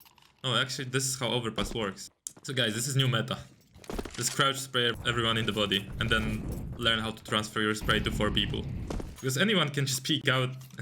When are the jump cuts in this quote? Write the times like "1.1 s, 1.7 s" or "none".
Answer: 2.0 s, 5.0 s, 9.1 s